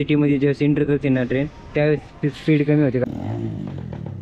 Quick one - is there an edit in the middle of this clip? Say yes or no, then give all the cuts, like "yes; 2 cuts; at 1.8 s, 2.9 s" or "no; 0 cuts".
yes; 1 cut; at 3.0 s